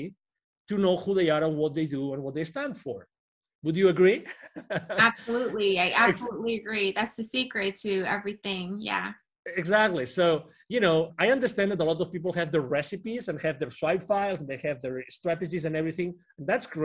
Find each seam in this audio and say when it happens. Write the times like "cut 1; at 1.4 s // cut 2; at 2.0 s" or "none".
none